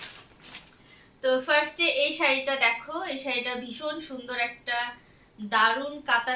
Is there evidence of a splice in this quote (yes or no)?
no